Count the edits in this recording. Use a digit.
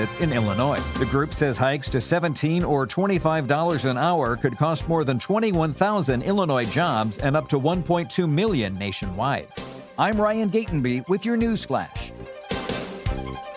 2